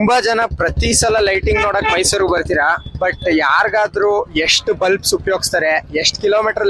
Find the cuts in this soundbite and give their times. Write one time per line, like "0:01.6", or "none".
none